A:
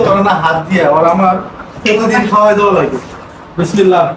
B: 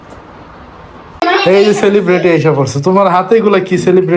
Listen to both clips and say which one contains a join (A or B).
B